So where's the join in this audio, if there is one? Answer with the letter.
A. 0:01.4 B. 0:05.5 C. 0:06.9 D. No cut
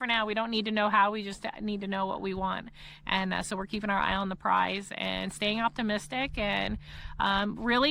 D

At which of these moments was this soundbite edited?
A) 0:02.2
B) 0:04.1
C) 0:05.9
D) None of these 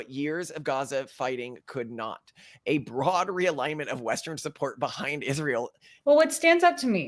C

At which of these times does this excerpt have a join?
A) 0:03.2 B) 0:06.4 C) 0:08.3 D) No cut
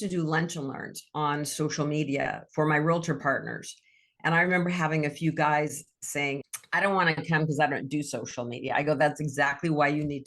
B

